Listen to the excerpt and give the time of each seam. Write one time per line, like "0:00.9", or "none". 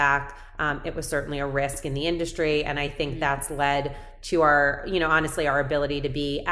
none